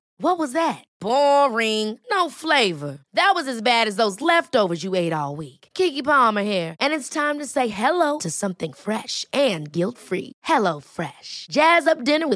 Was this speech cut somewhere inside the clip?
no; 0 cuts

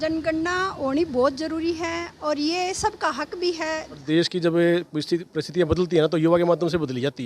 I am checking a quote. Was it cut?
yes; 1 cut; at 4.0 s

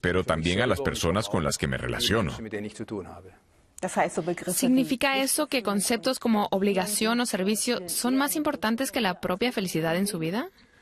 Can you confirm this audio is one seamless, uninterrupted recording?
no; 1 cut; at 5.2 s

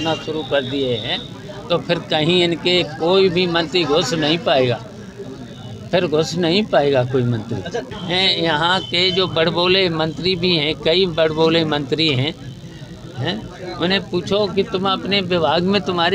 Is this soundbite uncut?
no; 1 cut; at 7.9 s

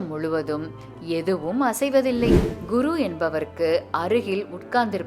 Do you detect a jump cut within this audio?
yes; 1 cut; at 2.5 s

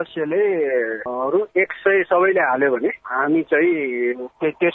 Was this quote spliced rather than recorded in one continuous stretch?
no; 0 cuts

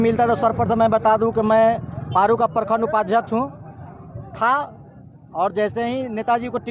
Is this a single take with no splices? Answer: yes; 0 cuts

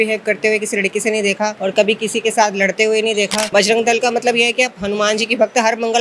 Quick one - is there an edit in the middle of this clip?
yes; 2 cuts; at 1.6 s, 3.4 s

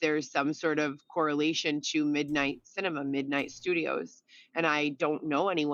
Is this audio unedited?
yes; 0 cuts

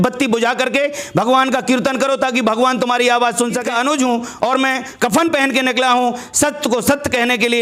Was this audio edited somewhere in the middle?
yes; 1 cut; at 3.7 s

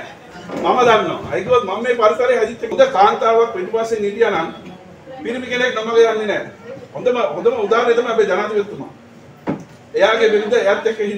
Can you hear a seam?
yes; 1 cut; at 2.6 s

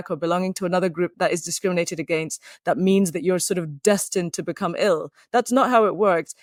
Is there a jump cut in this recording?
no; 0 cuts

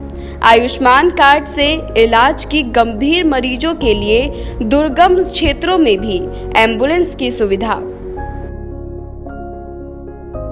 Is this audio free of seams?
yes; 0 cuts

